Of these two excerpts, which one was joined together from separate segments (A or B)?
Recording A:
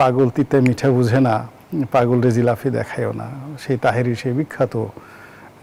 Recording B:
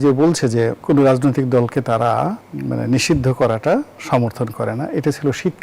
B